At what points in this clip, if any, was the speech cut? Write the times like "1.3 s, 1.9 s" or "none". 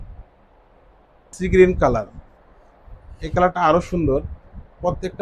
1.3 s